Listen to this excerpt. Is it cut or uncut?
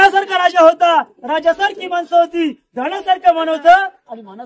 uncut